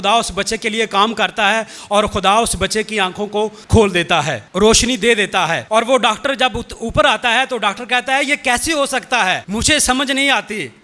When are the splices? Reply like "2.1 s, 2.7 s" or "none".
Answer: 3.6 s, 4.4 s, 5.6 s, 9.4 s